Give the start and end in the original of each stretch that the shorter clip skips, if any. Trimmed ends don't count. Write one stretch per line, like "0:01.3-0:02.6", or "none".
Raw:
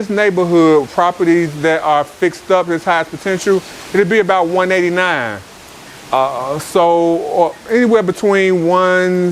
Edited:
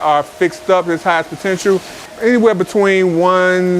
0:03.9-0:07.5